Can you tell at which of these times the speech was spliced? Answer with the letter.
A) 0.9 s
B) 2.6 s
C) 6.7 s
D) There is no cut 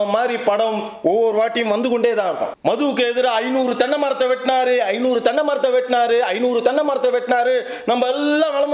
B